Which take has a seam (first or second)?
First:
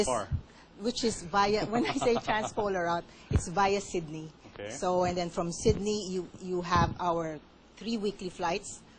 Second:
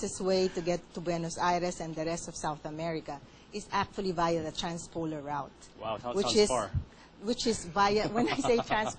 second